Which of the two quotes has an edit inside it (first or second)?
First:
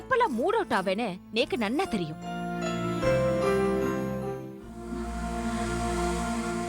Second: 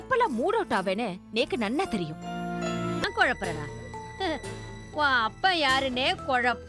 second